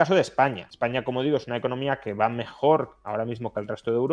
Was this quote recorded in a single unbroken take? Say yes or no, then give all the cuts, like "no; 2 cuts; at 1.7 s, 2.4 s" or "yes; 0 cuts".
yes; 0 cuts